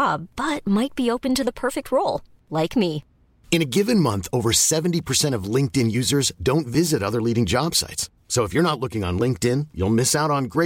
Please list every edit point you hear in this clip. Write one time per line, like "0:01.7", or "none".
none